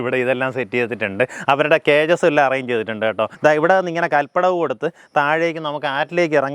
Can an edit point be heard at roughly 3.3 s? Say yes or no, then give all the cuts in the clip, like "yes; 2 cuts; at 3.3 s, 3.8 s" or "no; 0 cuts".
yes; 1 cut; at 3.3 s